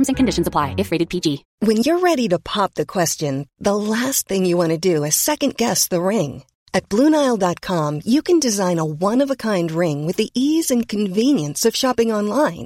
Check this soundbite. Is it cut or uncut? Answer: cut